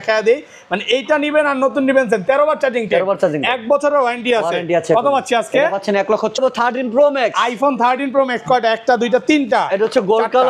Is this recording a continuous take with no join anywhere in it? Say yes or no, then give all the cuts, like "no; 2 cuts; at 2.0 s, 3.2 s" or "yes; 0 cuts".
no; 1 cut; at 6.4 s